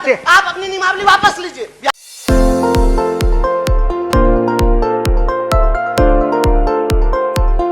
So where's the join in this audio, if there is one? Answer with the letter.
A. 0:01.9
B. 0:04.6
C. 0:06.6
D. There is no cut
A